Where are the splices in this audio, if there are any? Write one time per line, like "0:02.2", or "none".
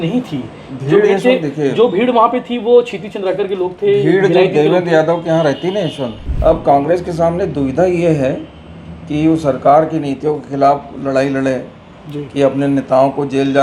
0:06.2